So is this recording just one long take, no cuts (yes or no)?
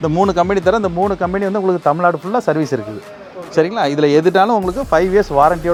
yes